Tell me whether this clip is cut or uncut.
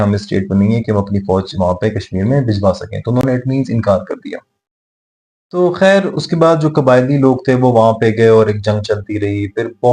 uncut